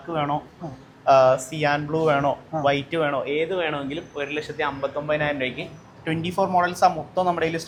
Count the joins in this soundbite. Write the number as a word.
zero